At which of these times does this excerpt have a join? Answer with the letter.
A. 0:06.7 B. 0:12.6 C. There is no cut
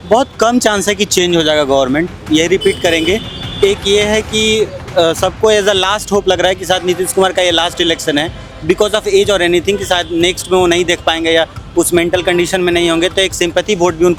C